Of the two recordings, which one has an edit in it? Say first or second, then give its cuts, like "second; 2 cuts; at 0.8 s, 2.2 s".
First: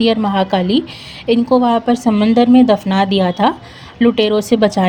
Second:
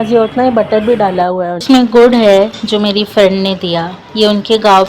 second; 1 cut; at 1.6 s